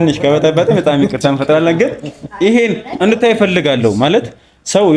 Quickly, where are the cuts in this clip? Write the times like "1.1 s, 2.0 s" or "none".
none

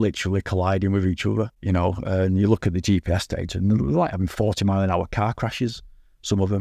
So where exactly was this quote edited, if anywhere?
1.6 s

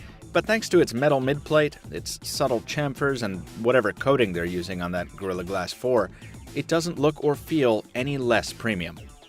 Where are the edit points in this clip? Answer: none

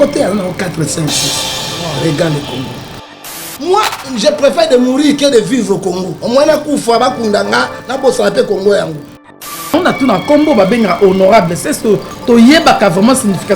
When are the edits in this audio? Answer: 3.4 s, 9.7 s

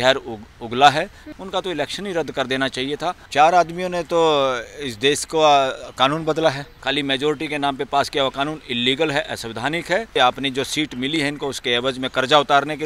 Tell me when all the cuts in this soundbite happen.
1.2 s, 3.2 s, 6.7 s, 10.1 s

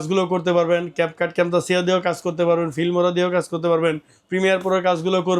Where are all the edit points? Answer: none

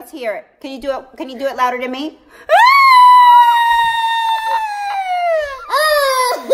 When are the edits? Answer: none

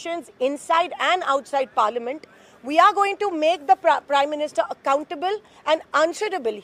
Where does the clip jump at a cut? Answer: none

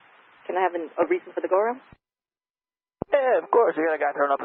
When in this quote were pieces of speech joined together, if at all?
none

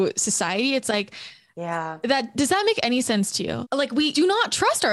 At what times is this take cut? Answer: 3.7 s

